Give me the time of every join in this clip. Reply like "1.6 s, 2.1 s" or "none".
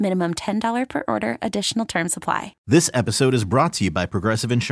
2.6 s